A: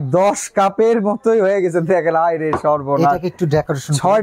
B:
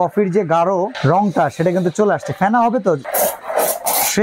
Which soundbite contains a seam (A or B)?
B